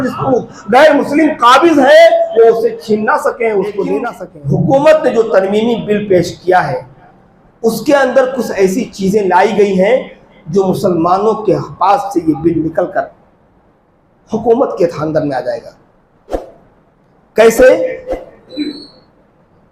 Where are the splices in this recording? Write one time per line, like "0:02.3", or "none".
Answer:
0:04.2